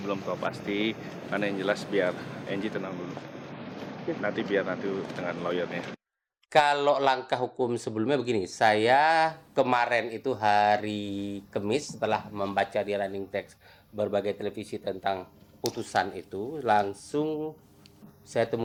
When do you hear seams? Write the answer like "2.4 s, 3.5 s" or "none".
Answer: none